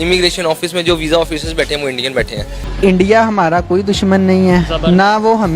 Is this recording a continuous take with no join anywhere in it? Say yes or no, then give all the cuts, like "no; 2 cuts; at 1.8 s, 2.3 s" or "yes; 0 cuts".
no; 1 cut; at 2.6 s